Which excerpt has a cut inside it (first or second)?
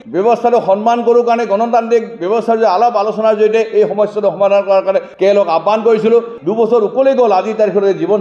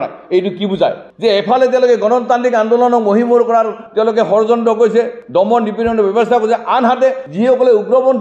first